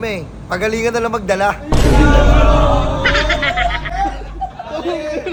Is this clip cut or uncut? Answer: uncut